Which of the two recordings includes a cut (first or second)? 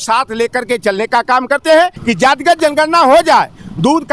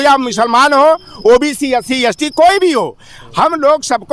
first